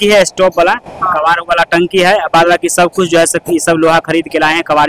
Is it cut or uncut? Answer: uncut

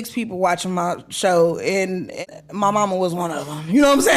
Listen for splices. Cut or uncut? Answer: cut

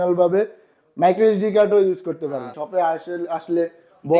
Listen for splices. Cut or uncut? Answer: cut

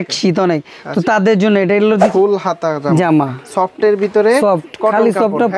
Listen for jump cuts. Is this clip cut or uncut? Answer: cut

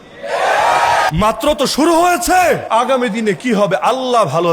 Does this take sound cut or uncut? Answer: cut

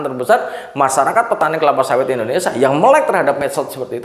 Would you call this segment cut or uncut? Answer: uncut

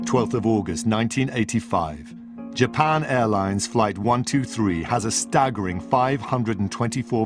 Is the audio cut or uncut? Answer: cut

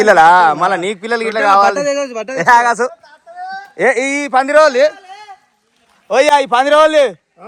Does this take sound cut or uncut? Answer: uncut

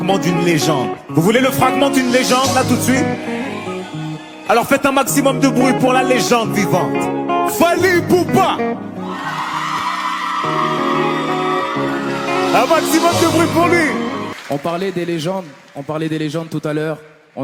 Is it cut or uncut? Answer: uncut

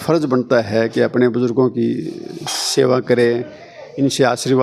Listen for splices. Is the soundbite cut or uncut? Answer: uncut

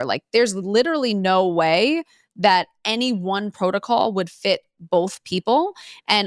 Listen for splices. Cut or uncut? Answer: uncut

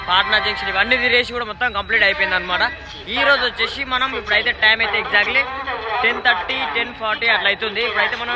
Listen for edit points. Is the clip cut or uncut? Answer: uncut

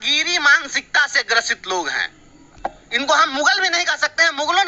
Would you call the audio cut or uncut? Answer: uncut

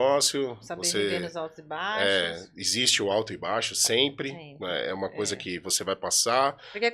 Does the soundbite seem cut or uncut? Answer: uncut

